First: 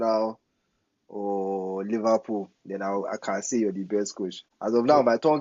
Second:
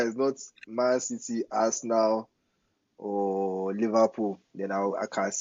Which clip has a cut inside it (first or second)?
first